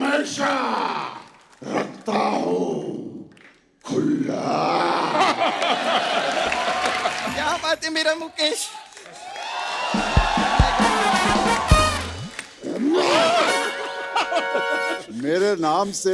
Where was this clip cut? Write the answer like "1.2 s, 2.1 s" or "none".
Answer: 7.3 s